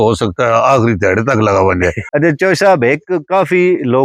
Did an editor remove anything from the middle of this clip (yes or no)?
yes